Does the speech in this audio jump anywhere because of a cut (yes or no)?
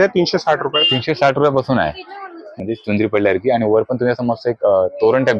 yes